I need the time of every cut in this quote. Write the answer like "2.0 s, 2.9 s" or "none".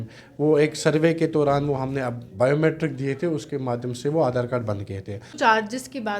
5.3 s